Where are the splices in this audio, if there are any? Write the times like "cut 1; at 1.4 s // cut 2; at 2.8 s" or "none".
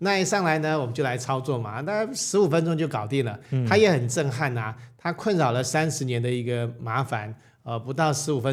none